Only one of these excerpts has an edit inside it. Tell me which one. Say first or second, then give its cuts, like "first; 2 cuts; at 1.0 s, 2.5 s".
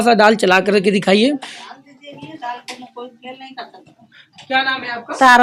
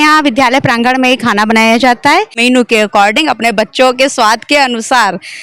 second; 1 cut; at 2.3 s